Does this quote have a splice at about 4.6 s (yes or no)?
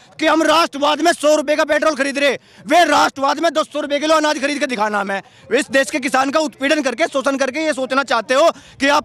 no